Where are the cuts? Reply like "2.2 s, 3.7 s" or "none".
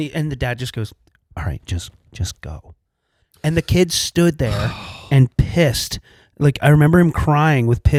none